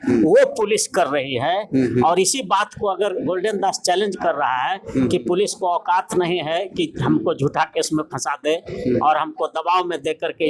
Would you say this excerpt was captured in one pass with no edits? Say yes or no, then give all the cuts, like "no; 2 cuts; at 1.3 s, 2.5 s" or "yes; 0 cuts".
yes; 0 cuts